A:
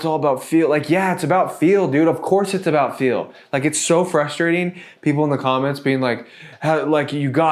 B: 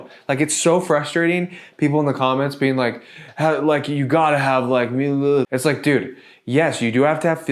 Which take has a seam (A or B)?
B